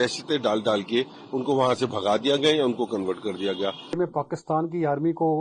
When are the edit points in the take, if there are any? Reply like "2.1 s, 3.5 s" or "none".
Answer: 4.0 s